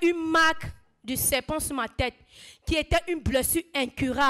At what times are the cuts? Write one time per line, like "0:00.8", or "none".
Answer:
none